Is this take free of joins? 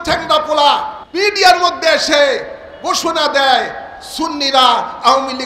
no; 1 cut; at 1.0 s

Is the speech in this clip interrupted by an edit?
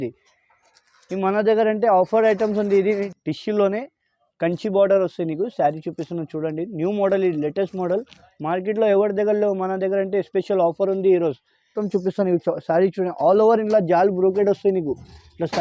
yes; 2 cuts; at 3.1 s, 11.8 s

